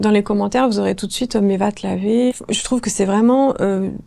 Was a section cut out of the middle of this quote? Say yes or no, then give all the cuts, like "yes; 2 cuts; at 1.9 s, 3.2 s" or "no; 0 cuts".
yes; 1 cut; at 2.3 s